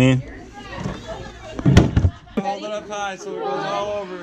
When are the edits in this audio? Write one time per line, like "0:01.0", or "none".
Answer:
0:02.4